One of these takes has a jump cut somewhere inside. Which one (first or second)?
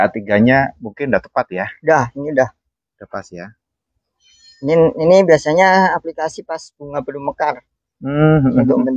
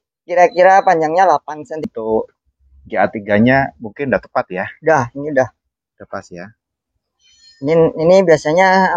second